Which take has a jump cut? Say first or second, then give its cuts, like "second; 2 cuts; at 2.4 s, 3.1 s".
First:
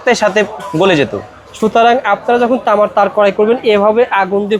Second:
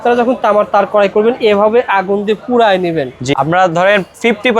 second; 1 cut; at 3.4 s